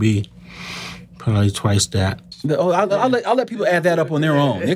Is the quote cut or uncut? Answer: cut